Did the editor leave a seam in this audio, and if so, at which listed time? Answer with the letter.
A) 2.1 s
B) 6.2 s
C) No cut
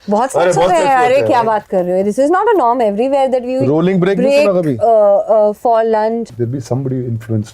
B